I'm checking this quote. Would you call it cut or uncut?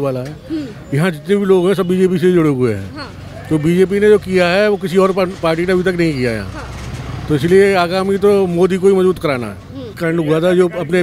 cut